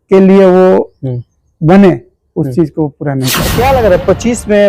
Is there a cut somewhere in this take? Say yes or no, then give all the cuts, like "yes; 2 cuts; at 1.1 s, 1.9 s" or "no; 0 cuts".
yes; 1 cut; at 3.4 s